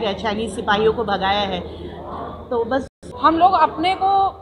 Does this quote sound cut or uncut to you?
cut